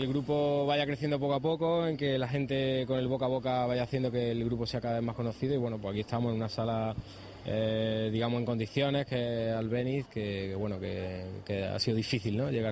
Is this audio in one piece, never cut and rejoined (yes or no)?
yes